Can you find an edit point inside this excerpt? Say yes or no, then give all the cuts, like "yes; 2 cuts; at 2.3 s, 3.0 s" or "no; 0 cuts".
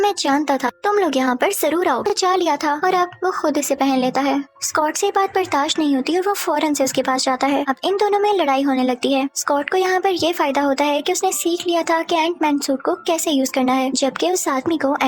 yes; 1 cut; at 2.0 s